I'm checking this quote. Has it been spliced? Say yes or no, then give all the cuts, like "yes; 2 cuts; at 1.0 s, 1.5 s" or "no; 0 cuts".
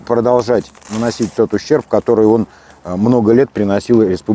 no; 0 cuts